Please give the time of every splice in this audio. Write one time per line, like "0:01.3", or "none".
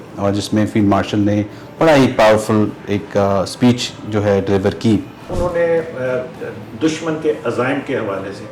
0:05.3